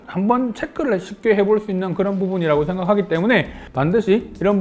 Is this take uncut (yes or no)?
no